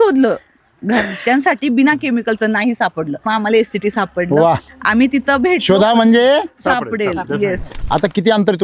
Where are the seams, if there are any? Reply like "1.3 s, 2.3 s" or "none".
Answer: 3.2 s, 7.7 s